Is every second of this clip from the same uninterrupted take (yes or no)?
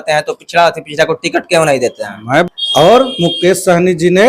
no